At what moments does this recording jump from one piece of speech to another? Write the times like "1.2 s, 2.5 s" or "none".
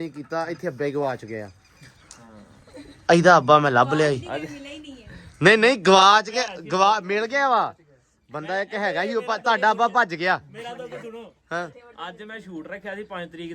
none